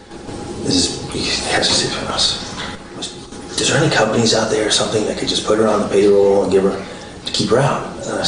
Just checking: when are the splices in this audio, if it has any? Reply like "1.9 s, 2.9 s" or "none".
none